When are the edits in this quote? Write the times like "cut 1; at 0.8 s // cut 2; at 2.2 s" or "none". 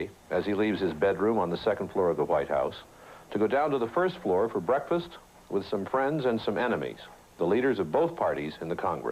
none